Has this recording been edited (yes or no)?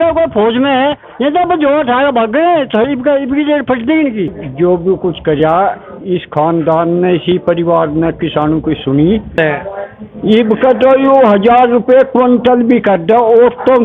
yes